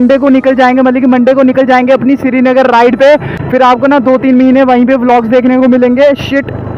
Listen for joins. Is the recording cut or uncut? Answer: uncut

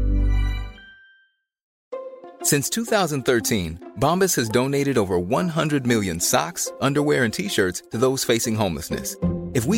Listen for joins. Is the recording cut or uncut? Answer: cut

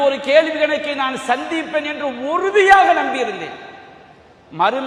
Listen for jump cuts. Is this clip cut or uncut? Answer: uncut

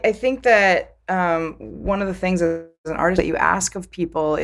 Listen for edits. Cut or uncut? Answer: uncut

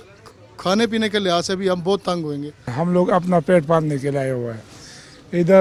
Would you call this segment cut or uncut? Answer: uncut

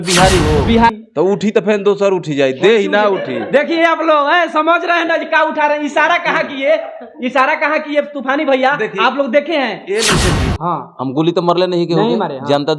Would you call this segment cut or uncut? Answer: cut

